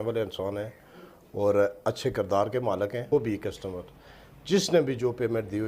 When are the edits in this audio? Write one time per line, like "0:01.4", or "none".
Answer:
0:03.1

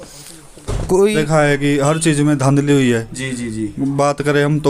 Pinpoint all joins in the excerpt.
0:01.2

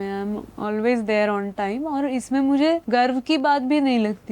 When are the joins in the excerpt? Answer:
0:02.8

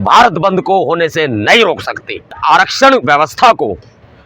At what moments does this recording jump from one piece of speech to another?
0:02.3

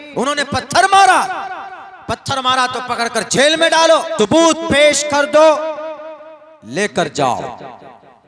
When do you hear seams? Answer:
0:04.1

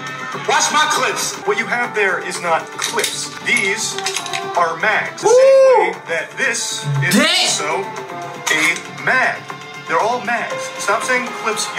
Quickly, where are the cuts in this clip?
0:01.4
0:03.3
0:05.1

